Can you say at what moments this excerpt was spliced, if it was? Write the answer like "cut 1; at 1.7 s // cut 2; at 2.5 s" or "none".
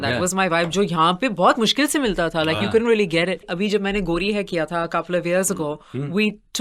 cut 1; at 3.4 s